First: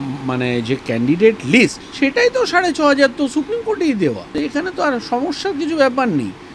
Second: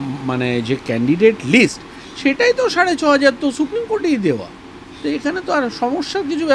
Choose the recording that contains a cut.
first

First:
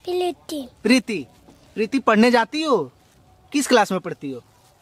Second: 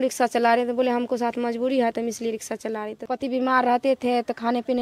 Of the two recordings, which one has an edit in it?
second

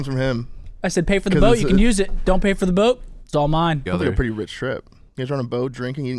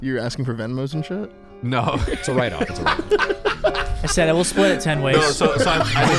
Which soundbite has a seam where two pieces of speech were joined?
first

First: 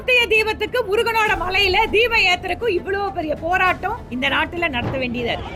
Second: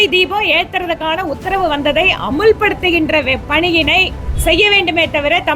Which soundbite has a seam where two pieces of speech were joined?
second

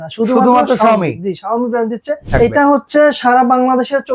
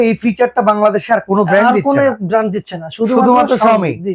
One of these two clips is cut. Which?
first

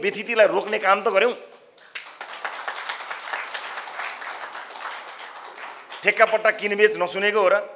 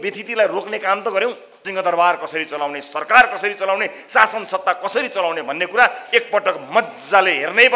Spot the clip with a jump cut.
second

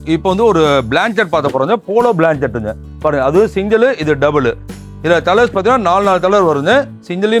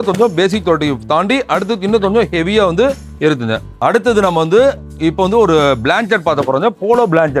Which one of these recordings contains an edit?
second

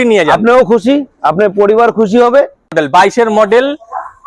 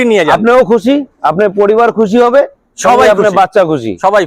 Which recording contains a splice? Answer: first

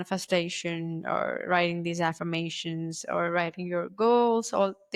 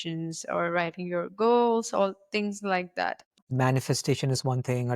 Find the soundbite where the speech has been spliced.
second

